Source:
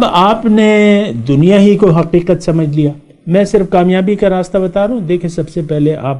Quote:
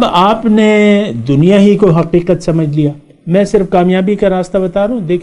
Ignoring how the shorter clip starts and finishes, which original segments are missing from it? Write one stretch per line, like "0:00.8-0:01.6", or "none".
none